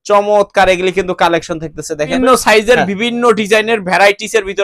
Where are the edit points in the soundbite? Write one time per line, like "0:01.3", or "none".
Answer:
0:02.1